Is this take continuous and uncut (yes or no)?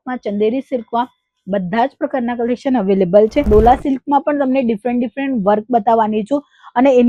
no